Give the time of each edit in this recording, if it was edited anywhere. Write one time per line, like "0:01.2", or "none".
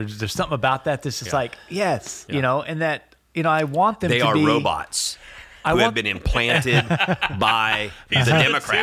0:02.1